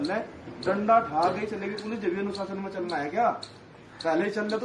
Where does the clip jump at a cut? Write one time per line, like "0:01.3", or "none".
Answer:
none